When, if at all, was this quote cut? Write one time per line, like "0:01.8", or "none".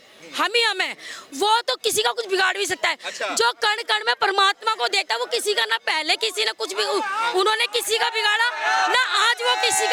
none